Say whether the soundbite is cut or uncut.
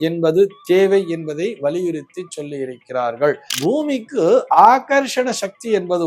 cut